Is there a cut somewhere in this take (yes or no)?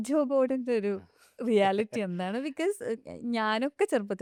no